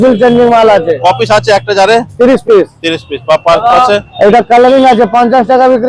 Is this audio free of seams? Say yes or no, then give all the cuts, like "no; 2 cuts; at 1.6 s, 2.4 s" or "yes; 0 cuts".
yes; 0 cuts